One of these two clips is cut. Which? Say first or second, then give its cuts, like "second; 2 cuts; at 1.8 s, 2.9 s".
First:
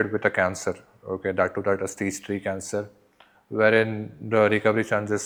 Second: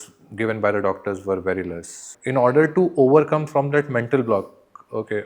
second; 1 cut; at 2.1 s